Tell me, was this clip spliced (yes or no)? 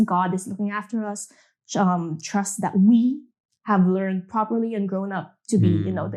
no